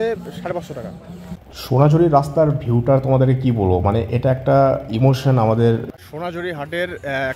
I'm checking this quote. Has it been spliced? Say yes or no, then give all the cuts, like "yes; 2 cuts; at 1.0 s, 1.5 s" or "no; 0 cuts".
yes; 2 cuts; at 1.4 s, 5.9 s